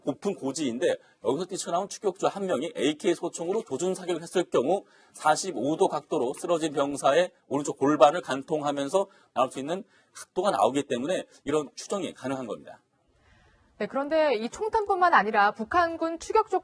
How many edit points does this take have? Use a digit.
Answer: 1